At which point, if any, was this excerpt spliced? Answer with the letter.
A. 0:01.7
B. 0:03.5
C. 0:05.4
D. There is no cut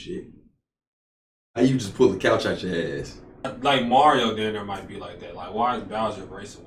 B